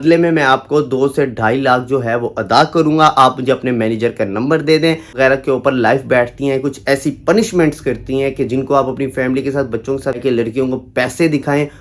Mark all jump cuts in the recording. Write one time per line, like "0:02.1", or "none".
0:05.1
0:10.2